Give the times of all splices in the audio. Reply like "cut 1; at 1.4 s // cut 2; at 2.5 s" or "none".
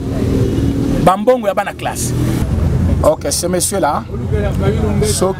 cut 1; at 2.4 s